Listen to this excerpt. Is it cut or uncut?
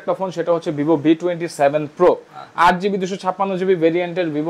uncut